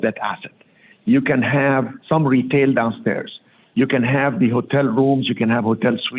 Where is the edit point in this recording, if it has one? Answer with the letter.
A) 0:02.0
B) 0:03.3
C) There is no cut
A